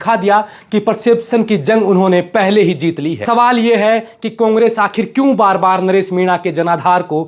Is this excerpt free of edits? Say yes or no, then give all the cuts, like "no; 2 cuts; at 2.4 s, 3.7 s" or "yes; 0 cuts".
no; 1 cut; at 3.2 s